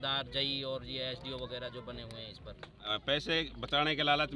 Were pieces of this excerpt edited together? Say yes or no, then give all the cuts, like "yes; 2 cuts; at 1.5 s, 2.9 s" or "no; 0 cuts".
yes; 1 cut; at 2.8 s